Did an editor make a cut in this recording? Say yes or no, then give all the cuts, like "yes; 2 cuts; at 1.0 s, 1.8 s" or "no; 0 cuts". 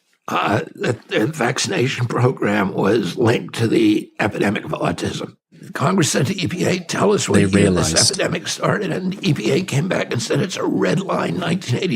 yes; 1 cut; at 5.5 s